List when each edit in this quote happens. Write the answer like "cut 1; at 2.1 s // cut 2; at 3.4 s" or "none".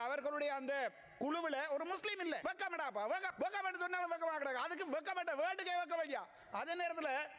cut 1; at 2.4 s // cut 2; at 3.3 s